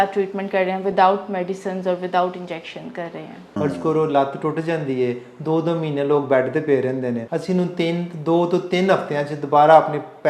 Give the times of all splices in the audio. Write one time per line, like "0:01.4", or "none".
0:03.4
0:07.2